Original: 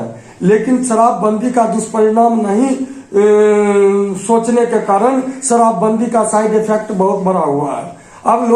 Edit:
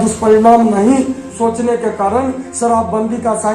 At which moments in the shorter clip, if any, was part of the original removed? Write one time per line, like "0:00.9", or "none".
0:01.2